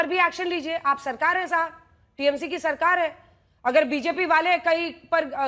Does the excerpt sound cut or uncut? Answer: uncut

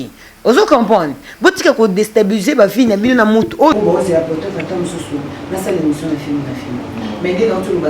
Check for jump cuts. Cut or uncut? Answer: cut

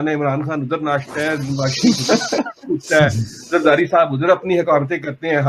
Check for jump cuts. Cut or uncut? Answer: uncut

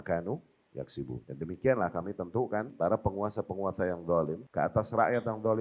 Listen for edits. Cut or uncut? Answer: cut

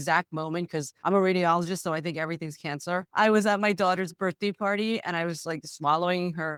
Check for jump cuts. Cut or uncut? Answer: uncut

